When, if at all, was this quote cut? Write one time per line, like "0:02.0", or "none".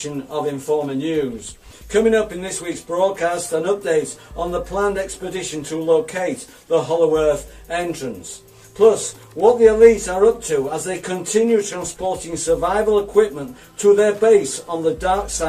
0:07.4